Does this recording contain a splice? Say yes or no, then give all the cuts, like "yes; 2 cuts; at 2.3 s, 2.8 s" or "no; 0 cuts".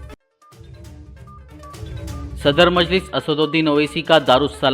yes; 1 cut; at 2.3 s